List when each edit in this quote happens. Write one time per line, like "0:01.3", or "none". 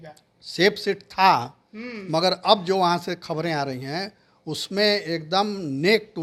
none